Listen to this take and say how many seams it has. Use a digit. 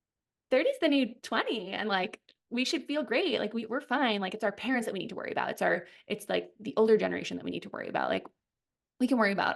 0